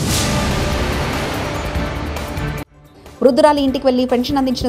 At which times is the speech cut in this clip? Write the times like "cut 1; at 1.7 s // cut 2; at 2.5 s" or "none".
none